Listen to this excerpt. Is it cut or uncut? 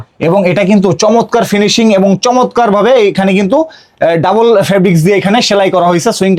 uncut